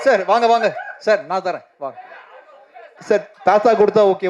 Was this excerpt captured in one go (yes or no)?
no